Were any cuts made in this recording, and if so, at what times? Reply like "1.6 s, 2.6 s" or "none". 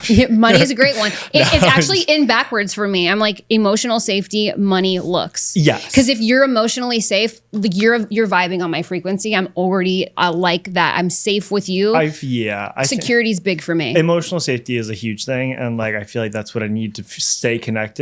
none